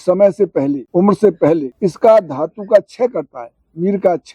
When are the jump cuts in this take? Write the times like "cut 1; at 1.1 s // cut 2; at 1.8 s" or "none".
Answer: cut 1; at 0.8 s // cut 2; at 1.7 s